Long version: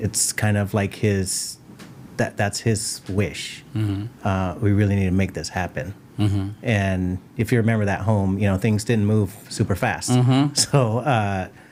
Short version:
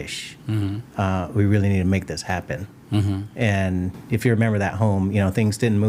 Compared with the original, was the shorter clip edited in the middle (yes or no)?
no